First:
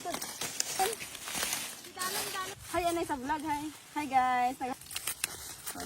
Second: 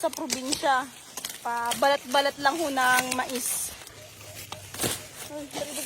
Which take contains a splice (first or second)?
first